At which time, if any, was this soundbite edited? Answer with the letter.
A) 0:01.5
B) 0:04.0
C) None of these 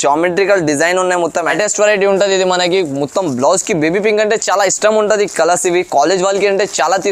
A